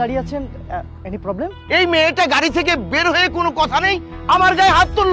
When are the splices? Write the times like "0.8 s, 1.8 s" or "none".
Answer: 1.6 s

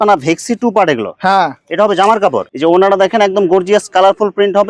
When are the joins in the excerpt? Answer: 2.4 s

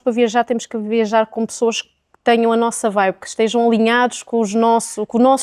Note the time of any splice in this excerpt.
none

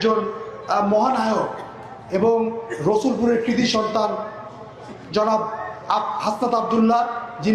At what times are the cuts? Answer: none

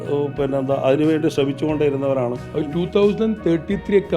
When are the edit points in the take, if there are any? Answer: 2.4 s

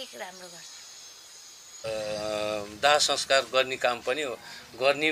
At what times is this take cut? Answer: 1.7 s

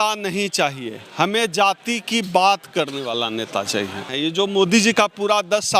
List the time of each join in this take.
4.1 s

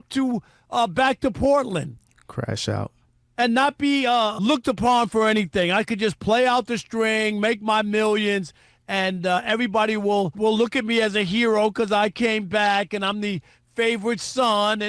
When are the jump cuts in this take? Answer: 4.3 s, 10.3 s

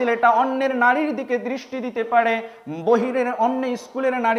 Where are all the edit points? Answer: none

